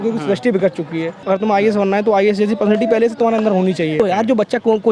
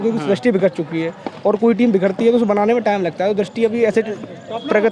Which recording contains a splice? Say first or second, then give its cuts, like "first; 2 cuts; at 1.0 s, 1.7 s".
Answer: first; 2 cuts; at 1.2 s, 3.9 s